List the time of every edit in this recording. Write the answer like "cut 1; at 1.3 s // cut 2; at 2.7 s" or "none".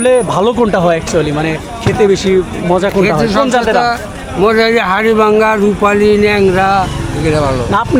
none